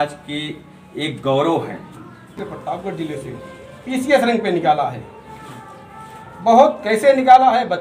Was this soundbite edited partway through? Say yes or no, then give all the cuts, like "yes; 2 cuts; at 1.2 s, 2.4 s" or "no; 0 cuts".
yes; 1 cut; at 2.3 s